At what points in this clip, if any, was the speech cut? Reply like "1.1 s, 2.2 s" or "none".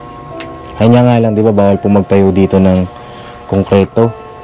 none